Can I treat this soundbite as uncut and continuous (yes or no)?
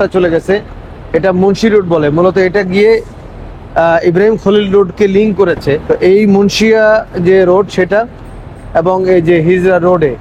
no